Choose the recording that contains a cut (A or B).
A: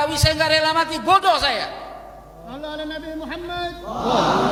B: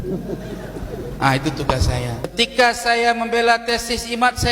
B